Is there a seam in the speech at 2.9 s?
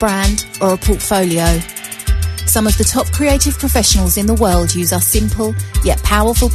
yes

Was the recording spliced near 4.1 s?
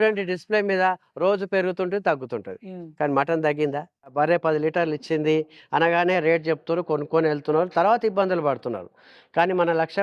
yes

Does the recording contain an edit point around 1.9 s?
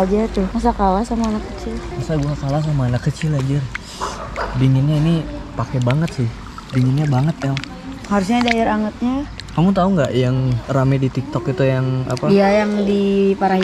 yes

